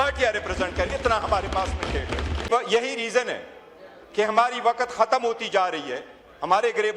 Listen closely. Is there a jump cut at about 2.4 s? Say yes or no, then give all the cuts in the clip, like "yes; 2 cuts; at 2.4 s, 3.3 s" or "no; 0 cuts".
yes; 1 cut; at 2.4 s